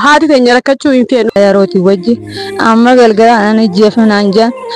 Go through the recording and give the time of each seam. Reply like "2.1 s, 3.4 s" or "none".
1.3 s